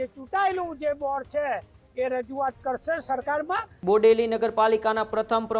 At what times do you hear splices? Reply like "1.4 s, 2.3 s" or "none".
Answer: 3.7 s